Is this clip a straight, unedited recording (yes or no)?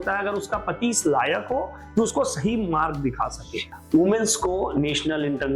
no